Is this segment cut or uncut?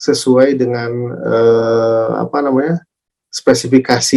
uncut